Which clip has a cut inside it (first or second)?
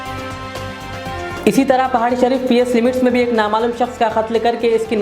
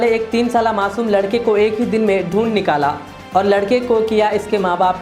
first